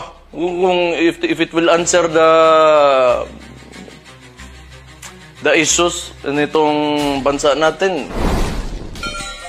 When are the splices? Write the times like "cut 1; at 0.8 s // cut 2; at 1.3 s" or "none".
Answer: cut 1; at 8.1 s